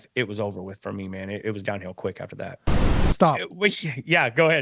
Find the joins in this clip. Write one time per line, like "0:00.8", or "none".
0:02.9